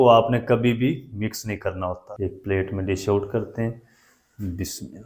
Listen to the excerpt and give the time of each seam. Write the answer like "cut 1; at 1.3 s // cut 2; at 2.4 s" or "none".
cut 1; at 2.1 s